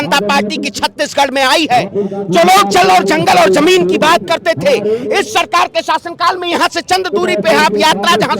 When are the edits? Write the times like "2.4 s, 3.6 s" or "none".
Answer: none